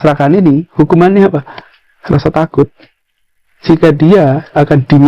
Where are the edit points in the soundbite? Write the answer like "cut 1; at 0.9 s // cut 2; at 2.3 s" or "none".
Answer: none